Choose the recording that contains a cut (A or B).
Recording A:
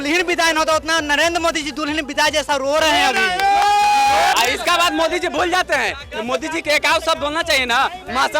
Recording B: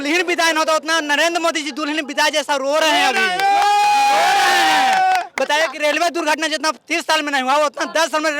A